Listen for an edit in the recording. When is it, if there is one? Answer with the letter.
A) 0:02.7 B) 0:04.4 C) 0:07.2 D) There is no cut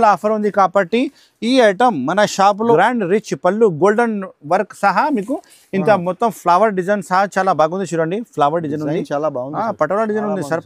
A